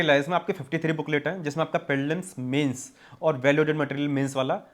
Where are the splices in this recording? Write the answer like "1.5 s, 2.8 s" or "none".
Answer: none